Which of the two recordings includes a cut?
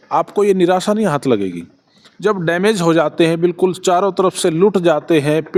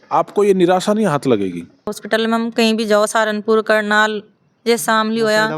second; 1 cut; at 2.0 s

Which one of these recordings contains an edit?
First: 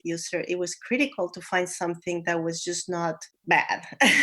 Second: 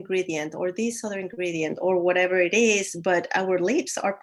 first; 1 cut; at 3.3 s

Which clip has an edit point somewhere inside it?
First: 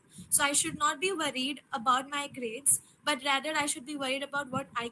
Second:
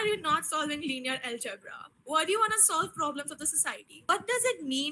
second; 1 cut; at 3.9 s

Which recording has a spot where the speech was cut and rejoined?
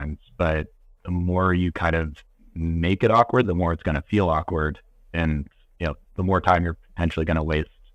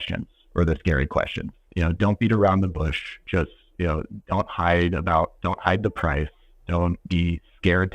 second; 1 cut; at 7.0 s

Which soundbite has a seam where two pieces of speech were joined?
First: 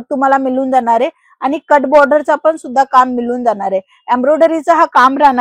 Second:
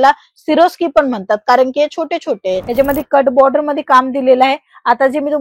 second; 1 cut; at 2.6 s

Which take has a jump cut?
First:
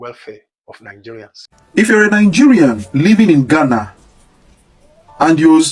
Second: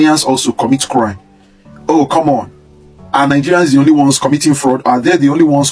first; 1 cut; at 1.6 s

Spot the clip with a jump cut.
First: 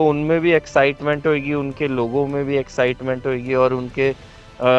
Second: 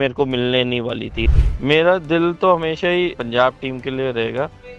second; 2 cuts; at 1.2 s, 3.2 s

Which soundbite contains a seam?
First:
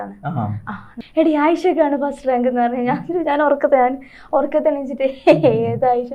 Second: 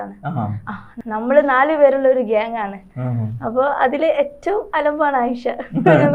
first; 1 cut; at 0.9 s

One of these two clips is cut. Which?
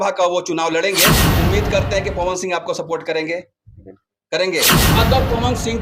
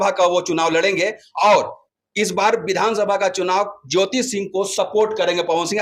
first; 2 cuts; at 1.2 s, 4.9 s

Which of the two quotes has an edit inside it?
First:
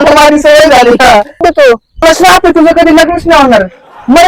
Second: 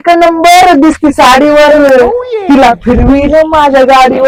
first; 1 cut; at 1.6 s

